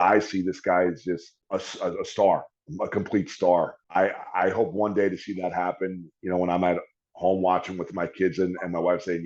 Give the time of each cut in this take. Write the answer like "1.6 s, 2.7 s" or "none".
1.3 s, 3.8 s